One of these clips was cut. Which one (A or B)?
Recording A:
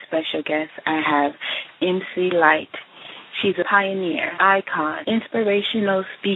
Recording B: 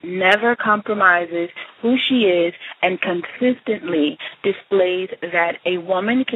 A